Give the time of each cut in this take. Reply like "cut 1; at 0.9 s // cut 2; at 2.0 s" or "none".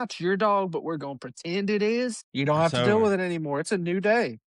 cut 1; at 2.2 s